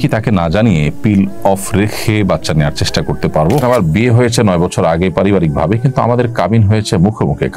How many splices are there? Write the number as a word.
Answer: one